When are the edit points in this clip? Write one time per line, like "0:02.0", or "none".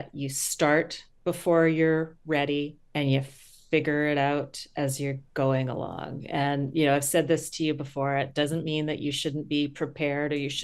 0:01.0
0:02.8